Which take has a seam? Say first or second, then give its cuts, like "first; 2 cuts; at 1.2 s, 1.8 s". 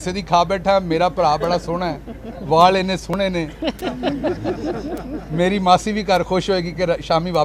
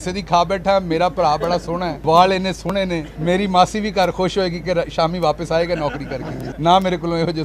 second; 3 cuts; at 1.9 s, 3.1 s, 6.4 s